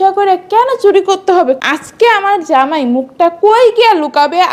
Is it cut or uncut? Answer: cut